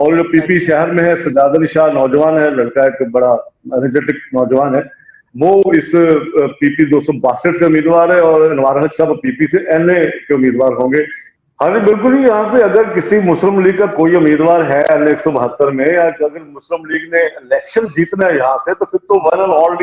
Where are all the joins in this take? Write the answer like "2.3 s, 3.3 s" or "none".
11.2 s